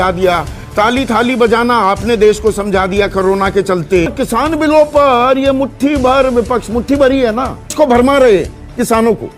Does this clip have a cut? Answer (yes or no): yes